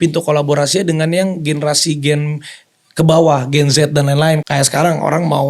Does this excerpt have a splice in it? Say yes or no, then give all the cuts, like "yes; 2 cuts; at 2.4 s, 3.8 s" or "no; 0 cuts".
yes; 1 cut; at 4.4 s